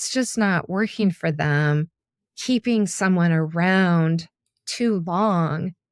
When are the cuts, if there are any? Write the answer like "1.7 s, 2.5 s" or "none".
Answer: none